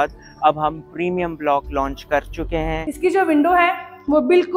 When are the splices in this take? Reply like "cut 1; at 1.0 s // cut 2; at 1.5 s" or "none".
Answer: cut 1; at 2.9 s